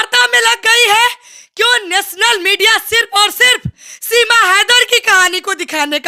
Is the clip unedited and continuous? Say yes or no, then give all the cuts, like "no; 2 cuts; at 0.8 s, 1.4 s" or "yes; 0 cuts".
yes; 0 cuts